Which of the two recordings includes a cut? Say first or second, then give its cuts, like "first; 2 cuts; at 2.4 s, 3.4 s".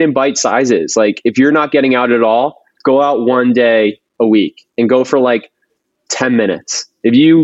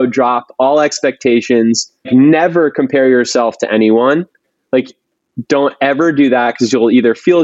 second; 1 cut; at 2.1 s